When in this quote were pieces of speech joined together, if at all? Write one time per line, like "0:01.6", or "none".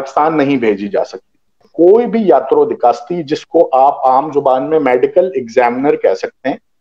0:01.7